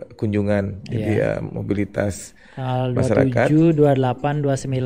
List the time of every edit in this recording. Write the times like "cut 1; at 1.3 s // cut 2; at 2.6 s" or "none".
none